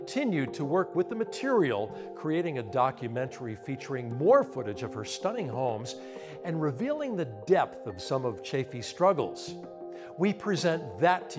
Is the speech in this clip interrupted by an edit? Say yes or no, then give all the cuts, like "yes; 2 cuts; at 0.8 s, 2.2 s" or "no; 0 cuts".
no; 0 cuts